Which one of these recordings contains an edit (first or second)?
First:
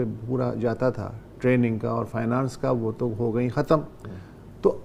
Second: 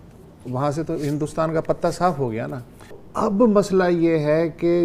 second